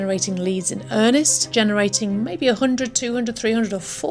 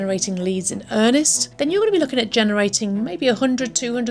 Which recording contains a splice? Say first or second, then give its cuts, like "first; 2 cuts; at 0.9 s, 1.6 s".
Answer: first; 1 cut; at 1.5 s